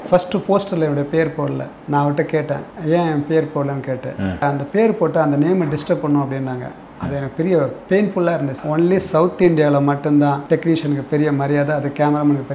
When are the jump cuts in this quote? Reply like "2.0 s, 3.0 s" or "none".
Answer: 1.7 s, 2.7 s, 4.4 s, 8.6 s, 10.4 s

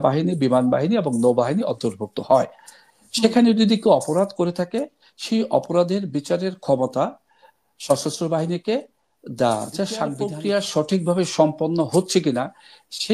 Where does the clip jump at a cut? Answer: 10.3 s

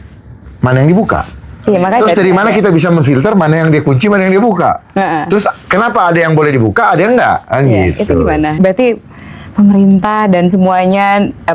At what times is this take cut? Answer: 8.6 s

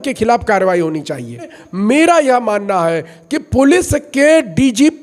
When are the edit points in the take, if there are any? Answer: 1.6 s

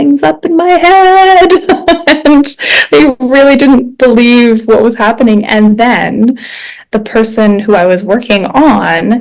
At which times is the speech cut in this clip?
none

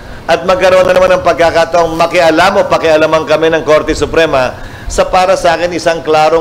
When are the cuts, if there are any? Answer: none

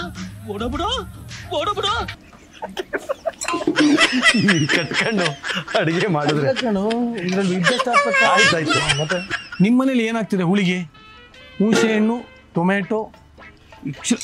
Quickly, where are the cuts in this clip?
9.3 s

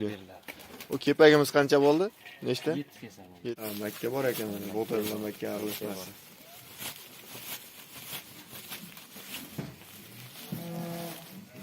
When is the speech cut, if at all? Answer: 3.5 s

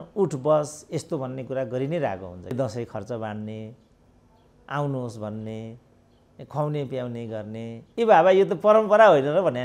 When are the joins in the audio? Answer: 2.5 s

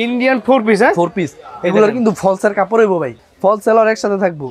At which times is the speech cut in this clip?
3.2 s

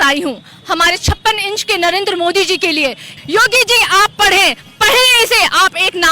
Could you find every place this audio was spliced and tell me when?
3.2 s

